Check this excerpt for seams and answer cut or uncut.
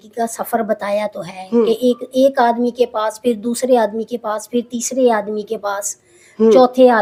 uncut